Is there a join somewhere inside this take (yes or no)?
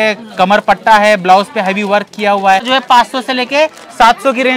yes